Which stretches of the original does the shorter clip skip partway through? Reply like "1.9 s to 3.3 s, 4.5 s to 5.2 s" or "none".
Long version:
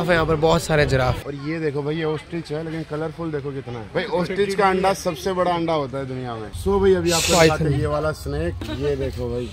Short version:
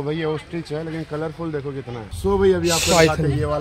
3.8 s to 6.4 s